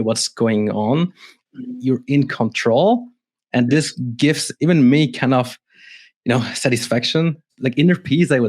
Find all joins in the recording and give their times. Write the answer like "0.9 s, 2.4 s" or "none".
1.5 s, 7.5 s

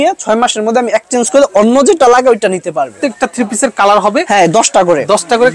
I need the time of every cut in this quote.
2.9 s

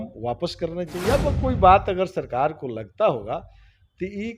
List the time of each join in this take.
1.0 s

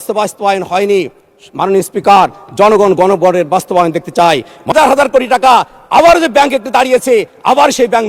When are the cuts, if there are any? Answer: 4.7 s

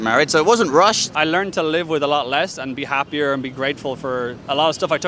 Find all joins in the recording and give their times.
1.1 s

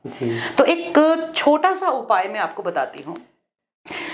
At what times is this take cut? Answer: none

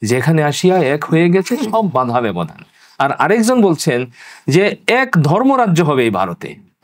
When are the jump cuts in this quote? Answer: none

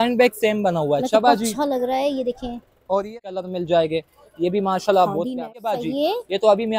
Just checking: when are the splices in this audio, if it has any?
3.2 s, 5.3 s

